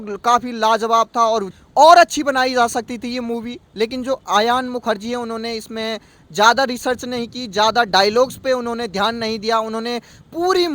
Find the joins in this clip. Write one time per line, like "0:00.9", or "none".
0:01.5